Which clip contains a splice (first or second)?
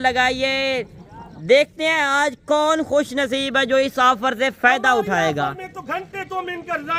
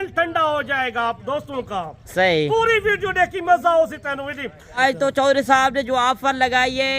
second